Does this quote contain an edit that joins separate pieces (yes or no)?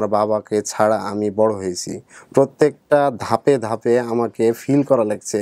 no